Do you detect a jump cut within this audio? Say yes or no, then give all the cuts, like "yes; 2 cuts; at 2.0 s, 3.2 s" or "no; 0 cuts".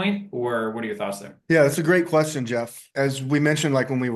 yes; 2 cuts; at 1.3 s, 2.8 s